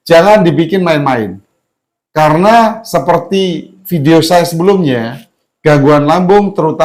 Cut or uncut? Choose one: uncut